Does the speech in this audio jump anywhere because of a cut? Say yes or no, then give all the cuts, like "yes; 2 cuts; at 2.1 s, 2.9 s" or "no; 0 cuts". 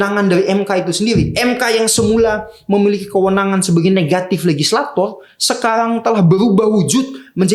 no; 0 cuts